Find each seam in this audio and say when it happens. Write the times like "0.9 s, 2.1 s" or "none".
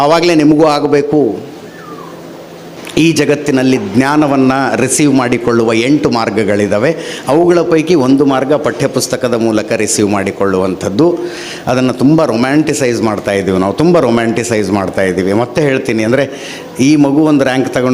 2.8 s